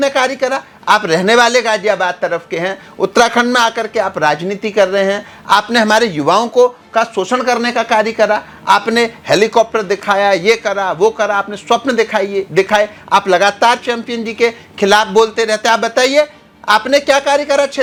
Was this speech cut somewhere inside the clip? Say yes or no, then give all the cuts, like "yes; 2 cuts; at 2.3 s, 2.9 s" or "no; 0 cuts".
no; 0 cuts